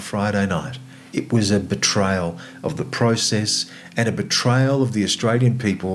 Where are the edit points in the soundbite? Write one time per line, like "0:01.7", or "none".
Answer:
0:01.0